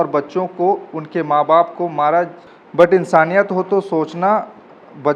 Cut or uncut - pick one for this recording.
cut